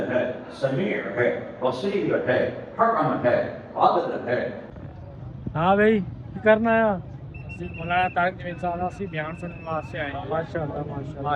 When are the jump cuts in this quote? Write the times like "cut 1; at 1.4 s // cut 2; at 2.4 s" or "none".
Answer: cut 1; at 4.7 s